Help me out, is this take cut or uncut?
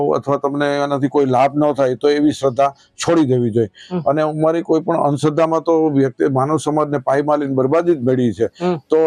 uncut